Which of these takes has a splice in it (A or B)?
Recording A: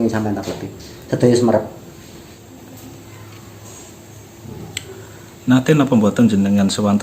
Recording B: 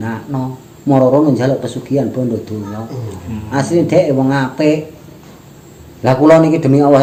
A